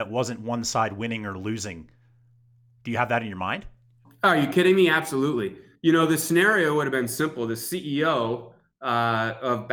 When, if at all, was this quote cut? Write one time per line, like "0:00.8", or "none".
0:05.6